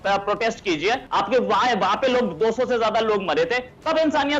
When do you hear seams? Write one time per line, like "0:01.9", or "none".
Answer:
0:01.1